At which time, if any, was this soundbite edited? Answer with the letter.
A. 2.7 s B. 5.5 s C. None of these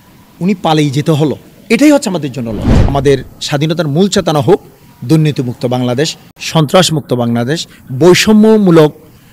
A